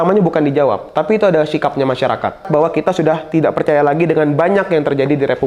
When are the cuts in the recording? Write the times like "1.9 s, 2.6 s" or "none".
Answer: 2.5 s